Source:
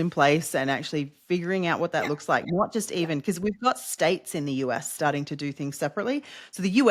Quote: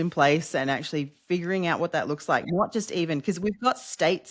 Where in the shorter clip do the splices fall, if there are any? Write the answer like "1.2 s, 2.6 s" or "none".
none